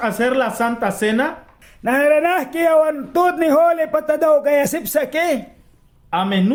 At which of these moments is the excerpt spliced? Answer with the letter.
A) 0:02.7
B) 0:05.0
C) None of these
C